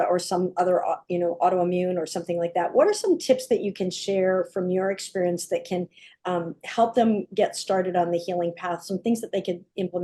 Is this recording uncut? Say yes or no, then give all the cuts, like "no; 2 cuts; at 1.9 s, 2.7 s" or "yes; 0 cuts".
yes; 0 cuts